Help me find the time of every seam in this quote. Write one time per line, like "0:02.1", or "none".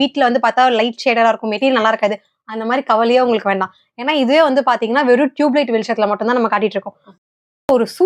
0:07.0